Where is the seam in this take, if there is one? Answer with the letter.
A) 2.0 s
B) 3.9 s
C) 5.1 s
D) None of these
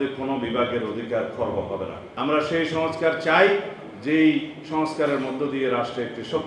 A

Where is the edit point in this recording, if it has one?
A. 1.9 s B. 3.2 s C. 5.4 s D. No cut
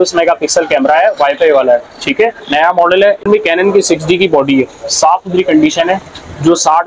B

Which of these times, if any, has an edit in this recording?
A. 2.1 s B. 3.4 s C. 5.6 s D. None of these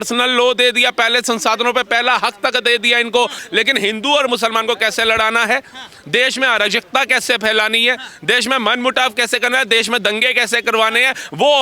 B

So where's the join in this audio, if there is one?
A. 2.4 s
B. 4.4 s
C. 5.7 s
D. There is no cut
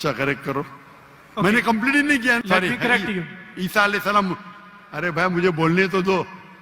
A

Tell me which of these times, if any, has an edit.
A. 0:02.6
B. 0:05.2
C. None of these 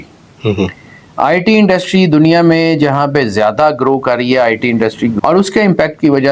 B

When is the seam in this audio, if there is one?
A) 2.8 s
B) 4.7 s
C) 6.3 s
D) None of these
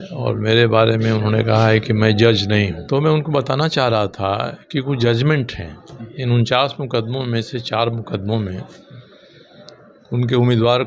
A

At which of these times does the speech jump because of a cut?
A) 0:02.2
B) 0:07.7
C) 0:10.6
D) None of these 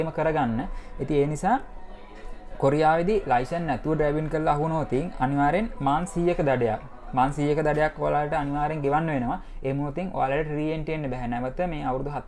D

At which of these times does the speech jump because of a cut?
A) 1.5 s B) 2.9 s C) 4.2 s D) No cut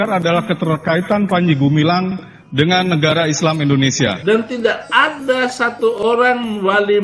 C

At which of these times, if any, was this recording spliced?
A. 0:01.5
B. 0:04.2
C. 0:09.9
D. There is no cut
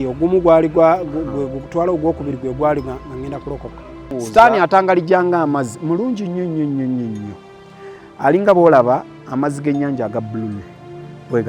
B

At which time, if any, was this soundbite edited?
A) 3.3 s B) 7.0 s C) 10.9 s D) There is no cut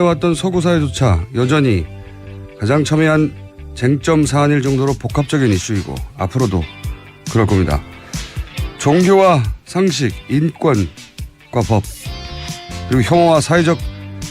C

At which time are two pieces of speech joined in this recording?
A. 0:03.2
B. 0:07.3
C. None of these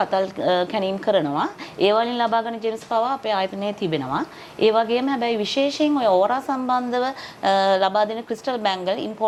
C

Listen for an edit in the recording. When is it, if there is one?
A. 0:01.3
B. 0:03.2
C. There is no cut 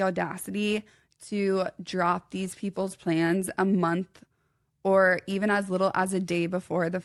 C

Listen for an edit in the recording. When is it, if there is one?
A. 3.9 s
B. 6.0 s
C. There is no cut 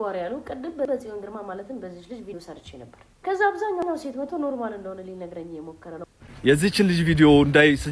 B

